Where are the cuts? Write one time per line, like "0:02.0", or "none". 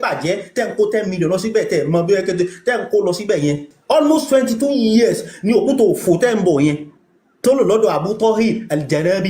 0:03.7